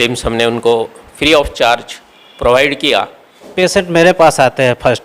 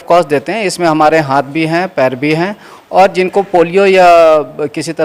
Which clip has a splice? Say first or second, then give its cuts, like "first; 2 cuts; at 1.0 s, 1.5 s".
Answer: first; 1 cut; at 3.5 s